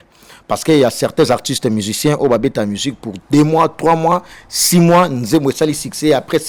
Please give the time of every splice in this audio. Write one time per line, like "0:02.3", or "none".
none